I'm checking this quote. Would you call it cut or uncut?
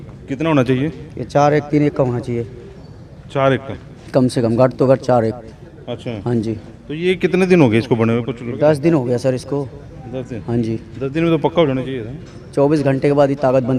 uncut